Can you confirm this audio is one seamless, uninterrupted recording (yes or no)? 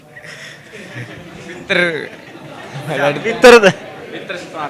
yes